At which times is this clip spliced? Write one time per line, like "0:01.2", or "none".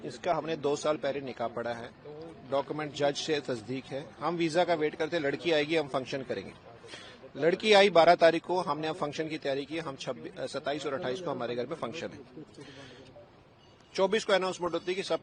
none